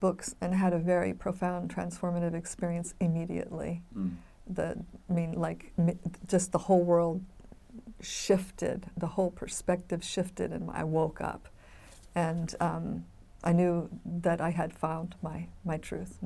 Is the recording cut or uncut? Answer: uncut